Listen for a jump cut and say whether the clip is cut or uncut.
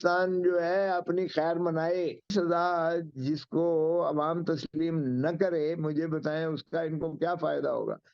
cut